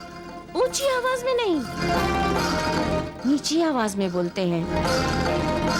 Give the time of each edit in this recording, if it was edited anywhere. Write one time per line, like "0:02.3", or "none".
none